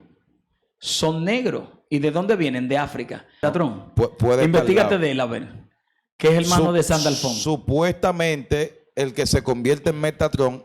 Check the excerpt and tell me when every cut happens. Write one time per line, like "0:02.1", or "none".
0:03.4